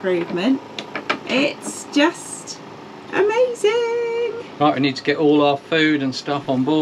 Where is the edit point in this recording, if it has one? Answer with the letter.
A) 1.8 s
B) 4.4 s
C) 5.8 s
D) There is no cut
B